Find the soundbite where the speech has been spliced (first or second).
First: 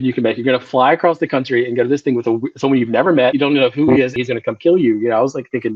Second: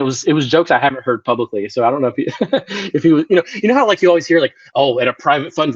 first